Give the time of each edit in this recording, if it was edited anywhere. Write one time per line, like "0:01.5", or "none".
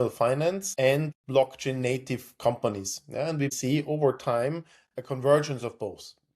0:01.0
0:03.5